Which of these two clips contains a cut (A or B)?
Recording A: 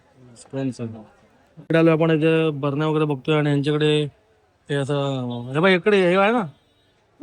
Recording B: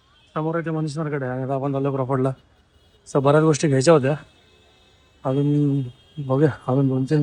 A